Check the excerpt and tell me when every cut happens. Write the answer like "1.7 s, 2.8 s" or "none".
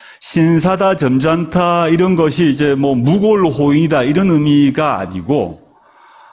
none